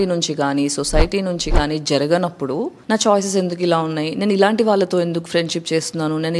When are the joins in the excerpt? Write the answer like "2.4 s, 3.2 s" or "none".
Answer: 2.8 s

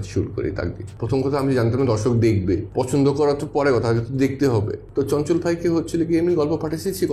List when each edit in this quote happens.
0.9 s, 2.7 s, 4.8 s

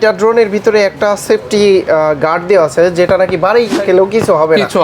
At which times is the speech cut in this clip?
none

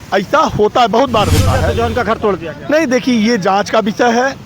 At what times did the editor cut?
1.7 s

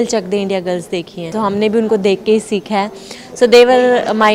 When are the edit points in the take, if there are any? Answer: 1.3 s

